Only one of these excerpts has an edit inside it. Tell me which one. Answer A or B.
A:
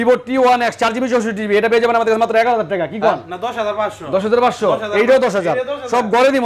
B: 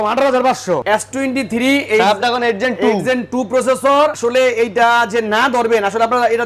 B